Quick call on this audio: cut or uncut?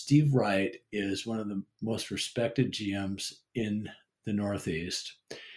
uncut